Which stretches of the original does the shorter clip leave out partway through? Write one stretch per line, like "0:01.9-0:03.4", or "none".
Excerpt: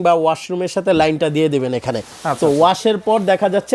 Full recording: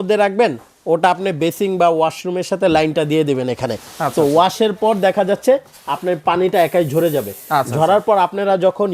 none